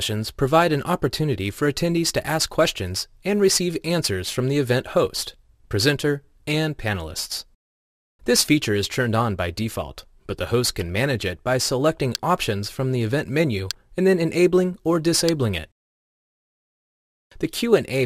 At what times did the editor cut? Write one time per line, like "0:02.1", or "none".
none